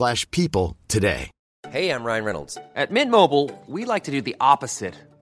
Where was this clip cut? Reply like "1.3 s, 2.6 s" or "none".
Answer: 1.6 s